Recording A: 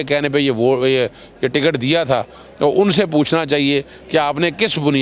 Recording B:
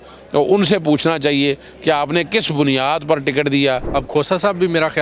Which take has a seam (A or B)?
B